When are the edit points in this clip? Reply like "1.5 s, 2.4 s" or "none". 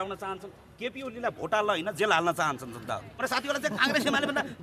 3.1 s